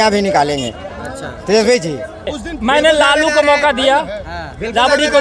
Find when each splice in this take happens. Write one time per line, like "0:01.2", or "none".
0:02.4